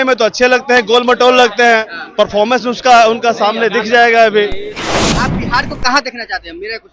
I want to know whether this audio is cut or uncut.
cut